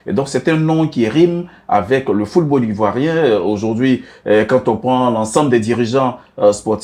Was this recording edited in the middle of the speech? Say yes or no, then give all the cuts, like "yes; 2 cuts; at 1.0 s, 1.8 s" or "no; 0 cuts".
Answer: no; 0 cuts